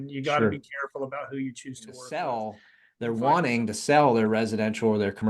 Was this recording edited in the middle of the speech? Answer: yes; 1 cut; at 2.0 s

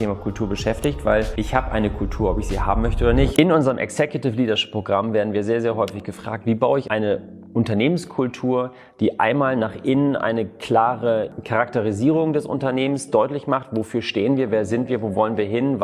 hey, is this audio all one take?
no; 1 cut; at 3.3 s

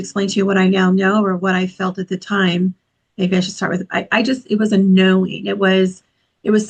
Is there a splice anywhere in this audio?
no; 0 cuts

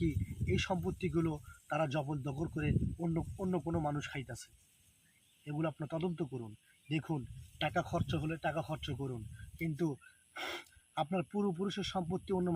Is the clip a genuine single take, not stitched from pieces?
yes; 0 cuts

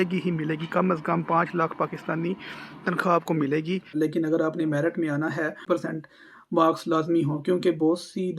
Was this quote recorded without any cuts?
no; 2 cuts; at 3.9 s, 5.6 s

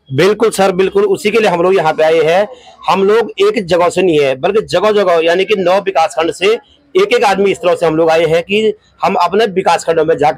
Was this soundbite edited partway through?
no; 0 cuts

